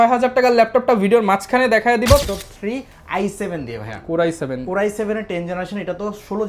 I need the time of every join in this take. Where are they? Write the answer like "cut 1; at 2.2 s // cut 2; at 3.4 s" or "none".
cut 1; at 2.2 s